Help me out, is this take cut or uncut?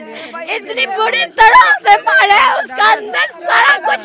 uncut